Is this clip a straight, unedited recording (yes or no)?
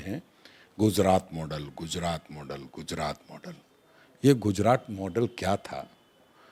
yes